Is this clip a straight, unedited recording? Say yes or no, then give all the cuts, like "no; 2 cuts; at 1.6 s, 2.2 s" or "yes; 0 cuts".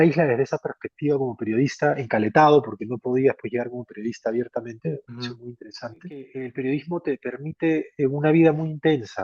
no; 1 cut; at 6.4 s